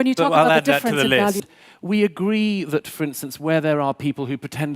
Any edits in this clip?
yes; 1 cut; at 1.5 s

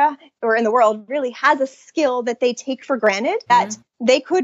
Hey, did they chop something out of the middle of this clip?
yes; 1 cut; at 3.5 s

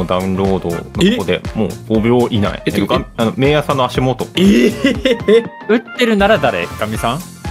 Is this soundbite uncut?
no; 5 cuts; at 0.8 s, 1.8 s, 2.6 s, 4.3 s, 5.6 s

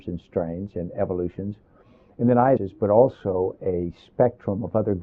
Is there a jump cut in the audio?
no; 0 cuts

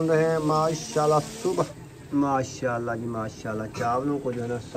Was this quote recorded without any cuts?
no; 1 cut; at 1.7 s

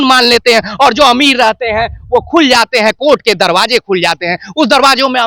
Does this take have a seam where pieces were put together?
no; 0 cuts

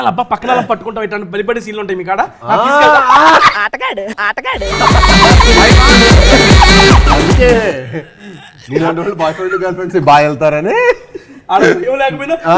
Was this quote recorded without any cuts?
yes; 0 cuts

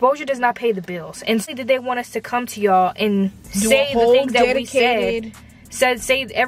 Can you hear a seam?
yes; 1 cut; at 1.5 s

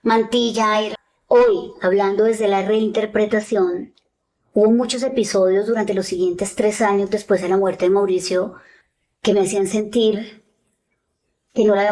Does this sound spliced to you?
yes; 1 cut; at 1.0 s

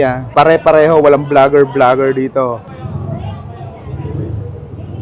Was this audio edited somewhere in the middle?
yes; 1 cut; at 2.7 s

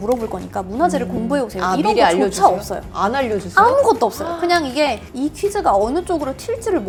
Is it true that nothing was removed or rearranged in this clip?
yes; 0 cuts

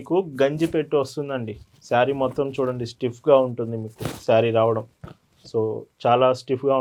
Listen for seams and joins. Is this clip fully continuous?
yes; 0 cuts

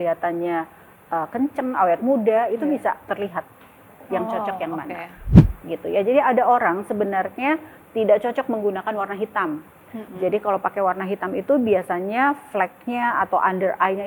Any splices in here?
yes; 1 cut; at 5.3 s

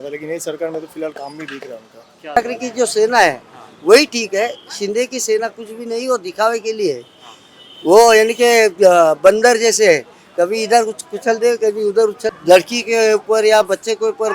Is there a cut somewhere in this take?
yes; 2 cuts; at 2.4 s, 12.4 s

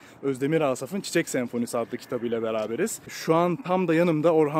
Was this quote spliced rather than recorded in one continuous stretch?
yes; 1 cut; at 3.2 s

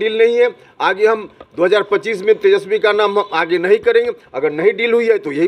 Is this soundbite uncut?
yes; 0 cuts

